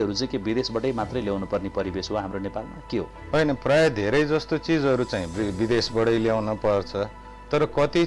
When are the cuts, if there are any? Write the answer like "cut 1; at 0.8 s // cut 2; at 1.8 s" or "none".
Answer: cut 1; at 3.2 s